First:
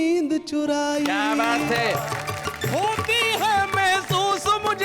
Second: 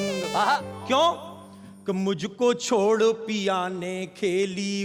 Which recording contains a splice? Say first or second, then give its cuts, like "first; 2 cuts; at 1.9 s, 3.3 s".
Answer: first; 1 cut; at 2.1 s